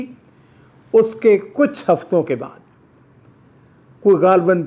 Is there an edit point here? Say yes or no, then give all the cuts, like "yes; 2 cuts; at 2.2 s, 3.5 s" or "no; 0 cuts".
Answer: no; 0 cuts